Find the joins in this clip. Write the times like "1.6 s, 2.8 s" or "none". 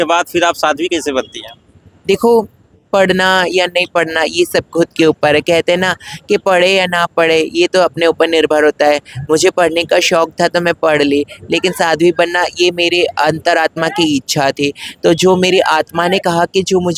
none

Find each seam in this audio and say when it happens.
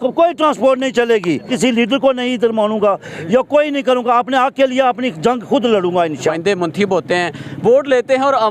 1.5 s, 6.3 s

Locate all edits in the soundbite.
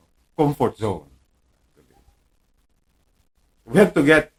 none

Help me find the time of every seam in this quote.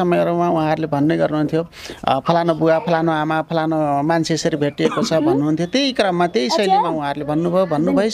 none

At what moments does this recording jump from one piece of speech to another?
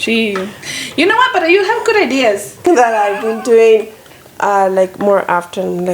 2.7 s

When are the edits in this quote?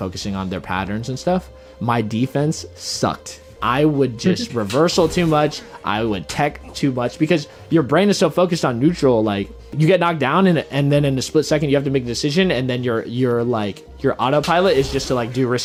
none

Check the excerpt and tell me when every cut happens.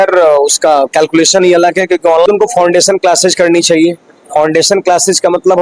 2.3 s

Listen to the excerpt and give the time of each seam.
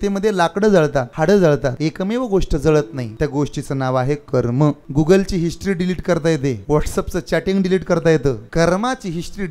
1.1 s, 1.8 s, 3.0 s, 4.8 s, 6.6 s, 8.4 s

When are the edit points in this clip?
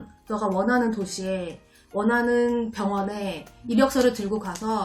none

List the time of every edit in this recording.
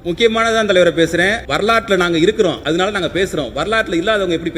1.4 s, 2.6 s

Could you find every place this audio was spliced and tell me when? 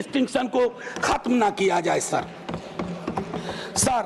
none

